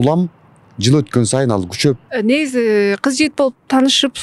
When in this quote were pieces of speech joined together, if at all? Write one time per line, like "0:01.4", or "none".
0:02.1